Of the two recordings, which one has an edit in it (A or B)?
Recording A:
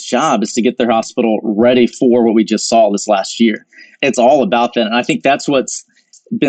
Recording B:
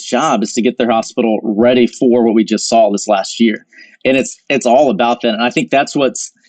A